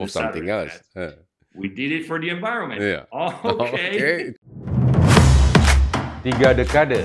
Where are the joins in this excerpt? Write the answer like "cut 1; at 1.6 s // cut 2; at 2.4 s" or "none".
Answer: cut 1; at 4.3 s